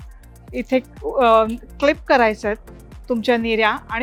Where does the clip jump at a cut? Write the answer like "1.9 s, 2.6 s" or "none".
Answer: none